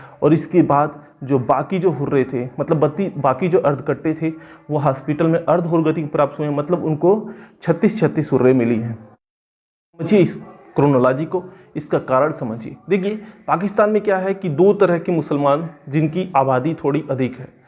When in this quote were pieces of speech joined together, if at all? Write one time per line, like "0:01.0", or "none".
0:10.1